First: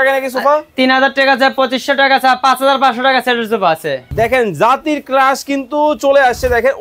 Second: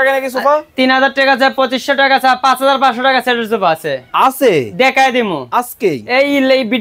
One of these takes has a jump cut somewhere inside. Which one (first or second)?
first